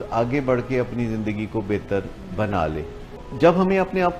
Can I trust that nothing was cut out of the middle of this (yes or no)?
no